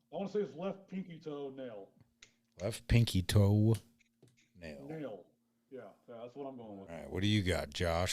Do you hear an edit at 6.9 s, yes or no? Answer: yes